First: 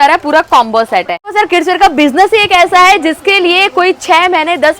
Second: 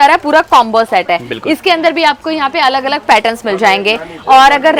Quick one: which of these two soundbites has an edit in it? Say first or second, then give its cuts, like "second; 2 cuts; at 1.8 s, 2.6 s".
first; 1 cut; at 1.3 s